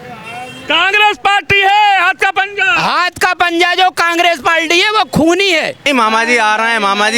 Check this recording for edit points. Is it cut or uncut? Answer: cut